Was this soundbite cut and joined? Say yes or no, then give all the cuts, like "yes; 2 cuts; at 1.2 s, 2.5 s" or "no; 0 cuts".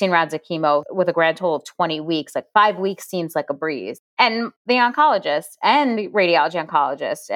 no; 0 cuts